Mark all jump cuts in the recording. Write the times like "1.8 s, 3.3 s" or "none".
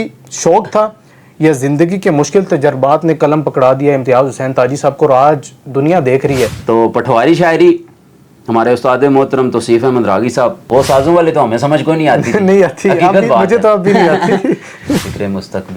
6.6 s, 10.6 s, 15.0 s